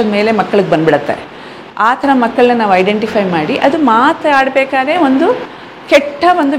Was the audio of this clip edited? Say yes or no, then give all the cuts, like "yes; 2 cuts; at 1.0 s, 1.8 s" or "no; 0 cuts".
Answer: no; 0 cuts